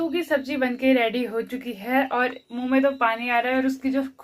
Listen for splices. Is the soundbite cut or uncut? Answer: uncut